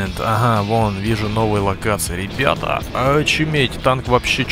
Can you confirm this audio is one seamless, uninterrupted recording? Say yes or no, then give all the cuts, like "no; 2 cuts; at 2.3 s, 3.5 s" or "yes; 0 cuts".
yes; 0 cuts